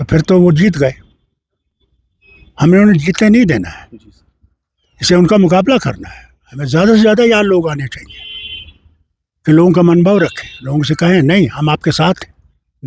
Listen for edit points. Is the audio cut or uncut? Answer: uncut